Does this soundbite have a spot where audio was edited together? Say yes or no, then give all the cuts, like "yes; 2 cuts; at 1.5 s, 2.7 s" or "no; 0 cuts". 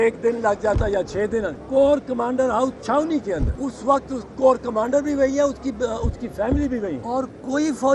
yes; 3 cuts; at 1.6 s, 3.5 s, 7.0 s